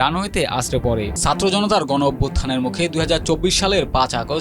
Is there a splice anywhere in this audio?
yes; 1 cut; at 1.1 s

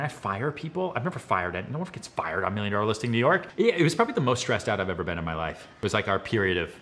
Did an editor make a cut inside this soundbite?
yes; 2 cuts; at 3.5 s, 5.6 s

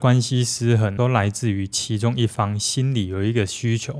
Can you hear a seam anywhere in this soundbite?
yes; 1 cut; at 0.9 s

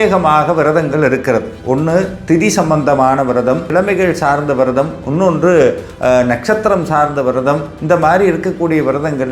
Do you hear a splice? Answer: yes; 1 cut; at 3.7 s

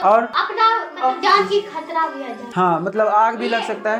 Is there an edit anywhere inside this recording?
no; 0 cuts

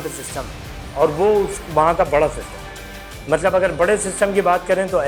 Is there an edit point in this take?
no; 0 cuts

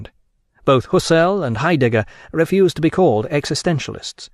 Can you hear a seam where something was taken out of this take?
yes; 1 cut; at 2.5 s

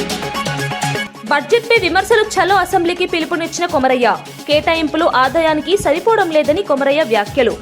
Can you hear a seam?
yes; 1 cut; at 1.0 s

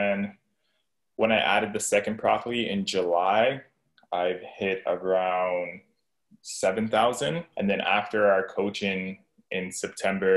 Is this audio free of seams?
no; 1 cut; at 7.4 s

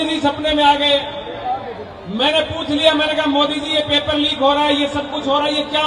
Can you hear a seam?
no; 0 cuts

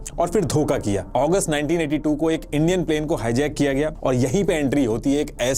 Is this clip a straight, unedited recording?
no; 2 cuts; at 1.1 s, 4.0 s

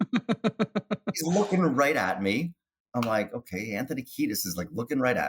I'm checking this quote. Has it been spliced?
no; 0 cuts

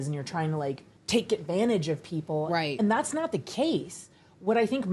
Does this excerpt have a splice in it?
yes; 1 cut; at 0.9 s

